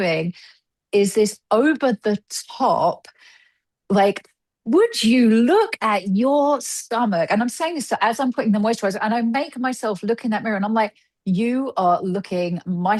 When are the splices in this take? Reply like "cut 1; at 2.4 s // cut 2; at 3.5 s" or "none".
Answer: none